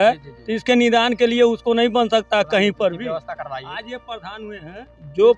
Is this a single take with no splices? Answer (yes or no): yes